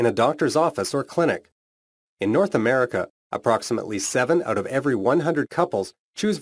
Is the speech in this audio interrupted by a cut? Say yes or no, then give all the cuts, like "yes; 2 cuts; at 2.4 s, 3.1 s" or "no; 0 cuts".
no; 0 cuts